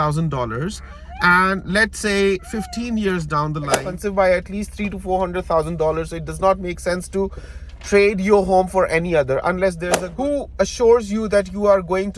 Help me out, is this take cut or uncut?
cut